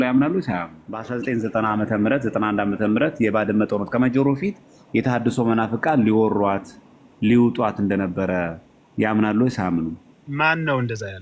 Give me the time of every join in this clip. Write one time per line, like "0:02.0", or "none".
0:01.1